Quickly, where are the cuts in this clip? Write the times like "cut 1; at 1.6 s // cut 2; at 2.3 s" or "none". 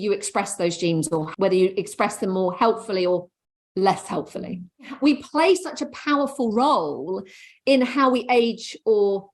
cut 1; at 1.3 s // cut 2; at 4.9 s